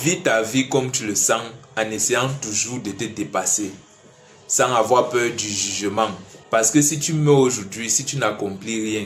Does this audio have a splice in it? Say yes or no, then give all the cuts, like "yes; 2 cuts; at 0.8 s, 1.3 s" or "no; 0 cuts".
yes; 1 cut; at 6.3 s